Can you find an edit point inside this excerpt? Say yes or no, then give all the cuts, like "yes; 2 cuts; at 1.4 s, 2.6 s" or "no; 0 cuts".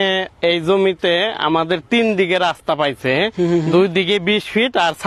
no; 0 cuts